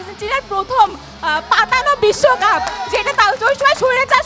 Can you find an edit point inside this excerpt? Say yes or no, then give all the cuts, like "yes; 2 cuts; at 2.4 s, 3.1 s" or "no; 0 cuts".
no; 0 cuts